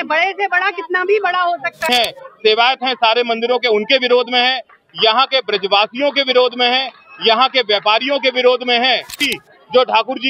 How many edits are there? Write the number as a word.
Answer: two